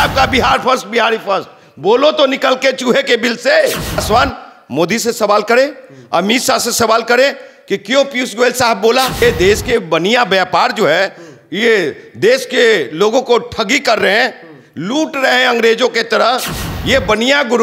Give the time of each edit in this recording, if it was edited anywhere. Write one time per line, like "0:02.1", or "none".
0:04.0
0:09.2